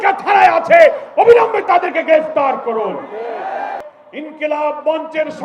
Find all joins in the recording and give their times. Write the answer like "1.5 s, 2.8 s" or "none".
3.9 s